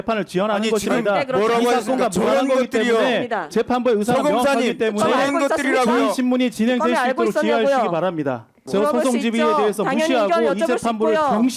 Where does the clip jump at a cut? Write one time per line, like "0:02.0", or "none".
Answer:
0:08.7